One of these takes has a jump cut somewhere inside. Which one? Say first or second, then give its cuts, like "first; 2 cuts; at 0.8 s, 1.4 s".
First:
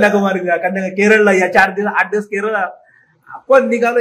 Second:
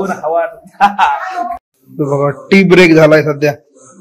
second; 1 cut; at 1.6 s